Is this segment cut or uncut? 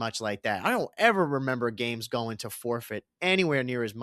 uncut